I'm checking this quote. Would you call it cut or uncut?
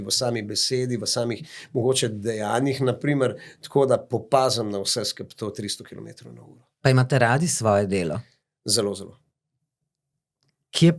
uncut